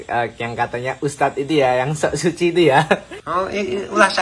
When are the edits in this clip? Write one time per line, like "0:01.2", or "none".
0:03.2

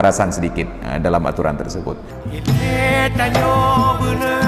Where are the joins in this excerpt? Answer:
0:02.1

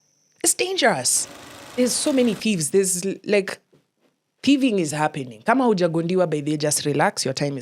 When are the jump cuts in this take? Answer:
0:01.7

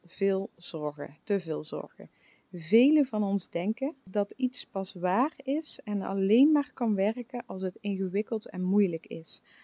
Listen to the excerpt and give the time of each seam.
0:04.0

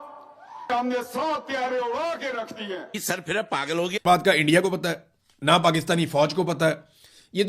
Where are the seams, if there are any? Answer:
0:04.0

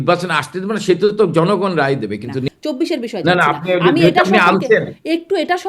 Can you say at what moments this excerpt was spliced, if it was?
0:02.4

